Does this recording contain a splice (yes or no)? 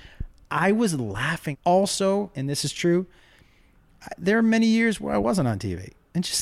yes